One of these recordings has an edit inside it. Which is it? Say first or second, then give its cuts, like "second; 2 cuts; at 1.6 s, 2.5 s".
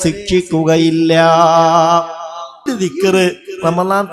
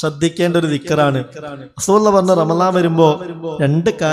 first; 1 cut; at 2.7 s